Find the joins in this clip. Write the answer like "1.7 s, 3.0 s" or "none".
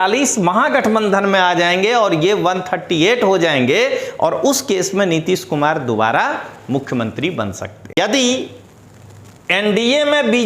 8.0 s